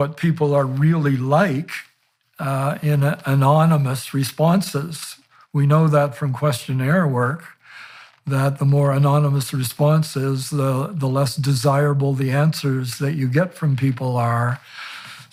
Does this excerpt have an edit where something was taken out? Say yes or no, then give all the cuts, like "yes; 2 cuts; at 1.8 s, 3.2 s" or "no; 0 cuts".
no; 0 cuts